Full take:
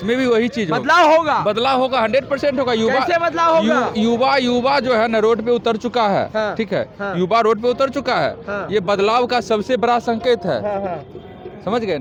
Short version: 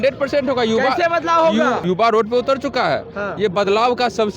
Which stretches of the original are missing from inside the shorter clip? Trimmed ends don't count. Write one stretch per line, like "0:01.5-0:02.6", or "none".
0:03.9-0:07.1